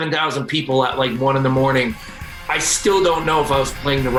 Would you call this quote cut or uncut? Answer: uncut